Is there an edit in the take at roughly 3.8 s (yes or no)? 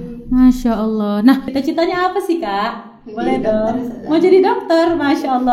no